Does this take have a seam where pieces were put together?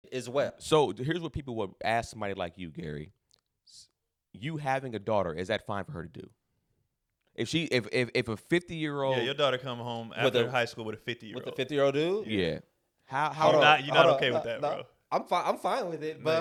no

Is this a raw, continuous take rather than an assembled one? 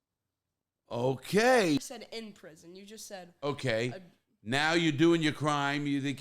no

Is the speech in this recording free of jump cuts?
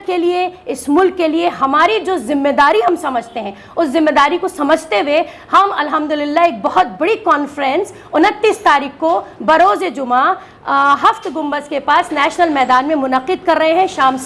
yes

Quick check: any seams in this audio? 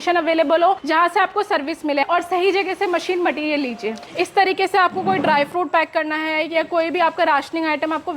yes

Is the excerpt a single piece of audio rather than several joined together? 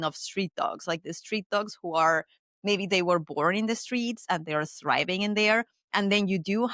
yes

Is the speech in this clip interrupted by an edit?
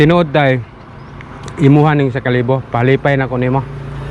no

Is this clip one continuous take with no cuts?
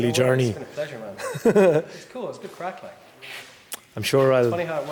yes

